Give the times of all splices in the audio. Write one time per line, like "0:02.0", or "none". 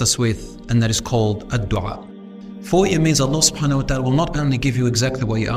0:02.1